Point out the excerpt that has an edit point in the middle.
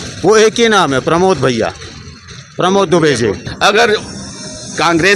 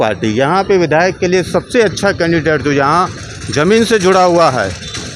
first; 1 cut; at 3.5 s

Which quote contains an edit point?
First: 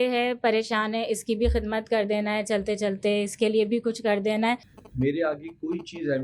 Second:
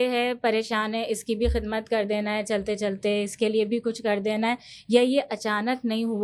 first; 1 cut; at 4.7 s

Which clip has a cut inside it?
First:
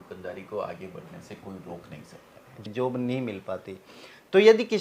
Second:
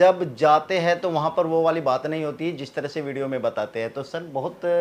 first; 1 cut; at 2.6 s

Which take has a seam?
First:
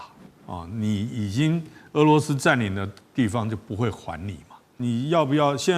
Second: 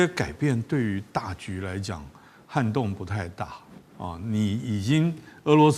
first; 1 cut; at 4.7 s

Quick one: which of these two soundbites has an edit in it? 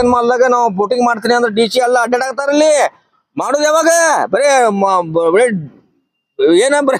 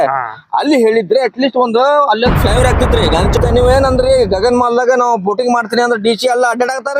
second; 1 cut; at 3.4 s

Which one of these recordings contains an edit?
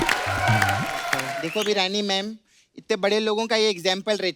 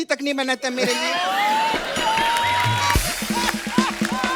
first; 1 cut; at 1.4 s

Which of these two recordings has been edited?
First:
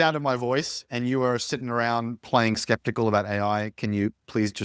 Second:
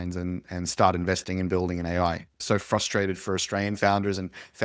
second; 1 cut; at 2.4 s

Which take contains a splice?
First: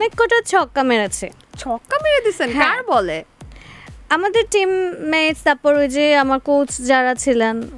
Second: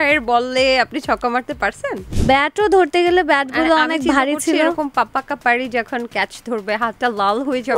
second; 1 cut; at 2.1 s

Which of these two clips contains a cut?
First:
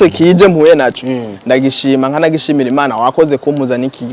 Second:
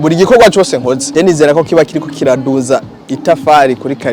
second; 1 cut; at 1.0 s

